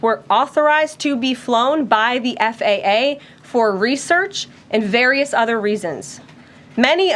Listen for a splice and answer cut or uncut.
cut